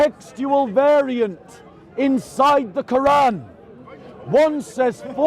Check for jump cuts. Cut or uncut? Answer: uncut